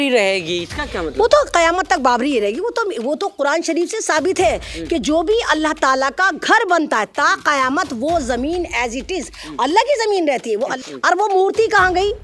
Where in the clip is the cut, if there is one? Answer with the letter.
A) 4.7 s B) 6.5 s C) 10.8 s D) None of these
C